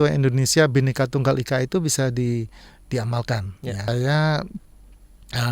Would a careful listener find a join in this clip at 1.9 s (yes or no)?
no